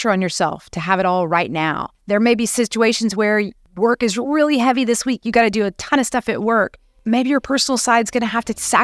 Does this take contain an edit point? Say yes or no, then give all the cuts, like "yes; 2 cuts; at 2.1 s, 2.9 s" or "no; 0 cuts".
yes; 3 cuts; at 1.9 s, 3.6 s, 6.9 s